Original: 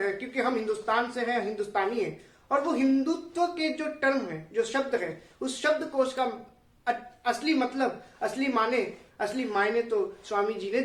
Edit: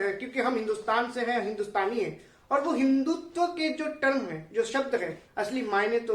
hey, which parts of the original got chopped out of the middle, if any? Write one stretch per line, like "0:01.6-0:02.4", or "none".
0:05.2-0:09.0

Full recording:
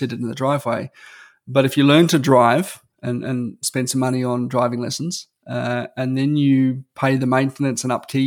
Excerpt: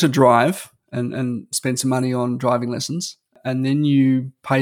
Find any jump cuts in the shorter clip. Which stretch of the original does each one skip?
0:05.5-0:05.9

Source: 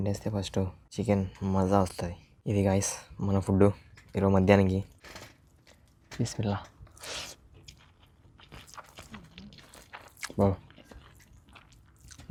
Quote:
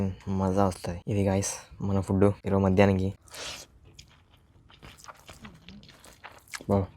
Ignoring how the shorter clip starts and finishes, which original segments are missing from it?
0:02.1-0:02.3
0:03.8-0:04.1
0:05.0-0:06.9

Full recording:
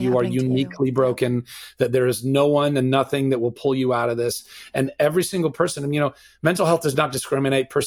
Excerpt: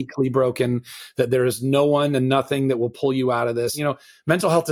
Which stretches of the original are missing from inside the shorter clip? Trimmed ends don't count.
0:04.4-0:05.9

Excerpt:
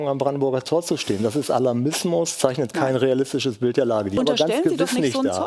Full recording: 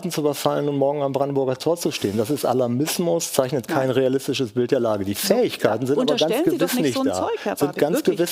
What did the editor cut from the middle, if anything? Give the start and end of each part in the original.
0:05.1-0:06.0

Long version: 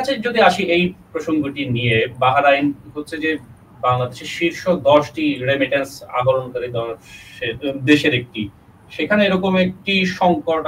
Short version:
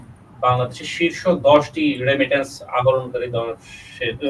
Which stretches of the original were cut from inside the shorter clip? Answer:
none

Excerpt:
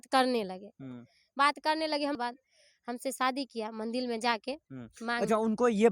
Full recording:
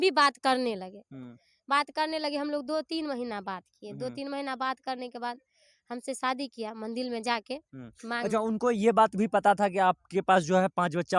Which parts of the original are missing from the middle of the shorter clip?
0:02.5-0:05.2

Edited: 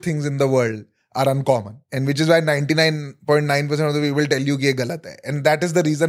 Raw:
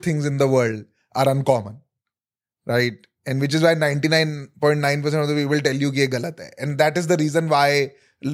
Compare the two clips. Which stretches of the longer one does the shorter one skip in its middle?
0:01.8-0:03.1

